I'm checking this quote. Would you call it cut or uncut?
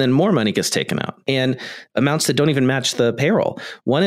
cut